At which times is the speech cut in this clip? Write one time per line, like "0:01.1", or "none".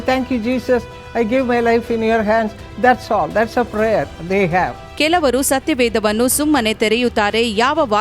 0:04.8